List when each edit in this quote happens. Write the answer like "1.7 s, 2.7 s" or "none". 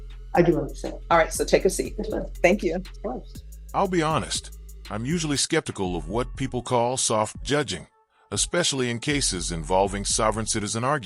none